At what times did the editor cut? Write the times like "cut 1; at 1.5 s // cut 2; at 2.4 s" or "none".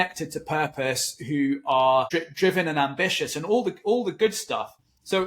cut 1; at 2.1 s

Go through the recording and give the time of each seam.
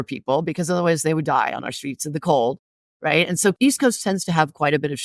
cut 1; at 3.6 s

